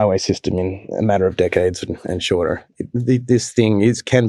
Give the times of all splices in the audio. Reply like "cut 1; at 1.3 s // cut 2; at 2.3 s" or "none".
none

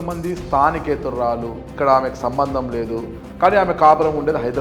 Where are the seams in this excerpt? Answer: cut 1; at 1.7 s // cut 2; at 3.2 s

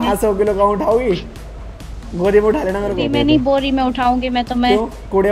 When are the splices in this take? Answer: cut 1; at 3.0 s

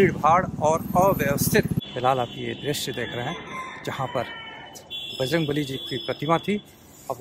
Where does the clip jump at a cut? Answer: cut 1; at 1.8 s

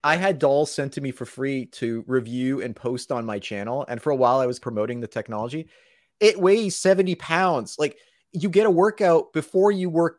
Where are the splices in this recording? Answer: cut 1; at 1.7 s // cut 2; at 6.0 s

